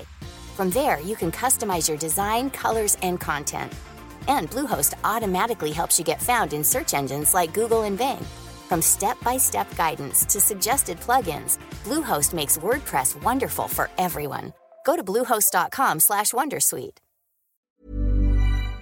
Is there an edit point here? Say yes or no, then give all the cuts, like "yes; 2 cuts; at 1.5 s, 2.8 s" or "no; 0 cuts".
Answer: yes; 1 cut; at 17.6 s